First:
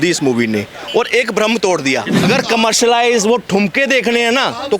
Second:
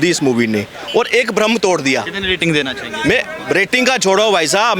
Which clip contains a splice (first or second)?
first